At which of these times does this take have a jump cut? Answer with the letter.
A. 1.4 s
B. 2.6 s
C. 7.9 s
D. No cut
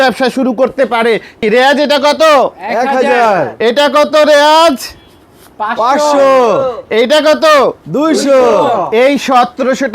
A